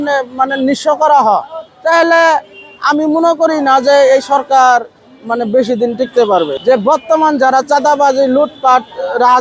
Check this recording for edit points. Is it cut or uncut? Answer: cut